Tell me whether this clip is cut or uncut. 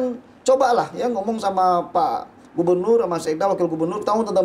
uncut